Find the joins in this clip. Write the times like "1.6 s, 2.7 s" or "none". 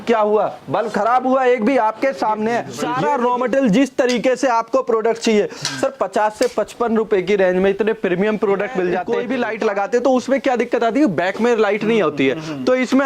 2.8 s, 9.1 s